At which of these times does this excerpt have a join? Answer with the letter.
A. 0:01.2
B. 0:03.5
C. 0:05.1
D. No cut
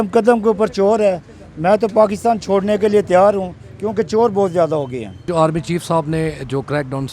C